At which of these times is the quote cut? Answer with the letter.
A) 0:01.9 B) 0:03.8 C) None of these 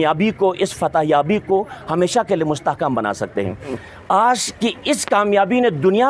B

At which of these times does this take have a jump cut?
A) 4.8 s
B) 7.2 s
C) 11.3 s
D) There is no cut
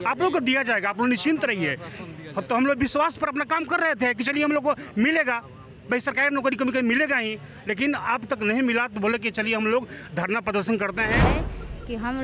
C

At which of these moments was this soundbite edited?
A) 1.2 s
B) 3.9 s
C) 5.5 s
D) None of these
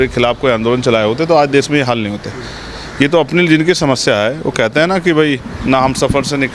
C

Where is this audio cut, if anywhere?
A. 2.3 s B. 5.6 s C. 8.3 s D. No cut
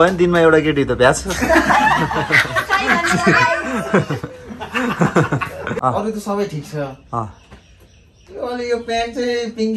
B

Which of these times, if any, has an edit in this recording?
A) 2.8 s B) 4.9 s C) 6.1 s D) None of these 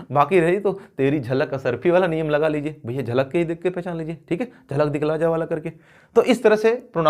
D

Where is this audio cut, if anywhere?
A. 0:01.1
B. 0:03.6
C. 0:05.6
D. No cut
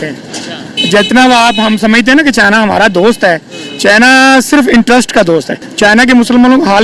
C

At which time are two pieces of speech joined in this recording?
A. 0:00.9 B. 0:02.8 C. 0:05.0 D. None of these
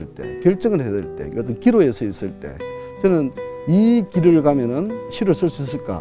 C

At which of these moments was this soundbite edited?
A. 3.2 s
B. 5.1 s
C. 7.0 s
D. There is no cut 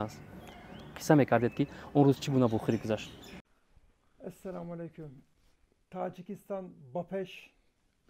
D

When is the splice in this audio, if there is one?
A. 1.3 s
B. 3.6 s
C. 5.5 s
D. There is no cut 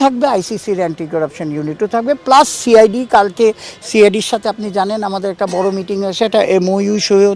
D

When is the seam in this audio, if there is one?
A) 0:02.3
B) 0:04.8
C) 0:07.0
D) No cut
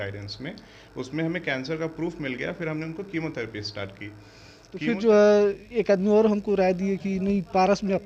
B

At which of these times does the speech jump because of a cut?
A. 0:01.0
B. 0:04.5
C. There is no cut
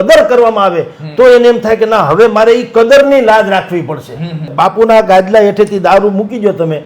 B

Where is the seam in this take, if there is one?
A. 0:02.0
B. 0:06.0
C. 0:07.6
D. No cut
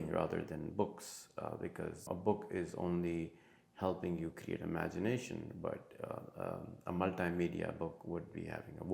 A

